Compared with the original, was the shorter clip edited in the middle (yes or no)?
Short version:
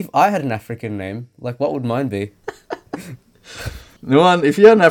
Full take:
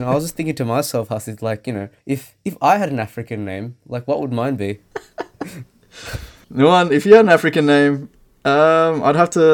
no